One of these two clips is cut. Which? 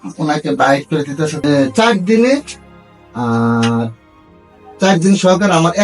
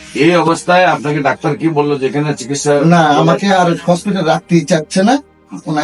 first; 1 cut; at 1.3 s

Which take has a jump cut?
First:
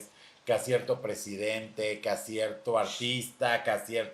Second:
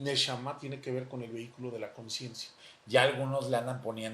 second; 1 cut; at 2.7 s

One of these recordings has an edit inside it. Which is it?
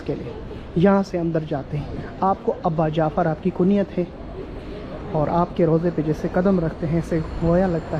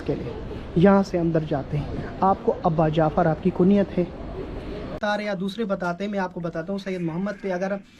second; 1 cut; at 5.0 s

